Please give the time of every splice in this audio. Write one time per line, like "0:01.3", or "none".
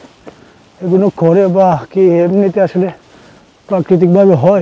none